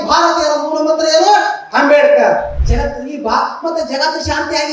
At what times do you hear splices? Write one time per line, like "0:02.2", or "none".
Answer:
0:02.6